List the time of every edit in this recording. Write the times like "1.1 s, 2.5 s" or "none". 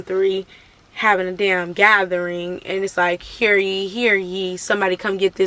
none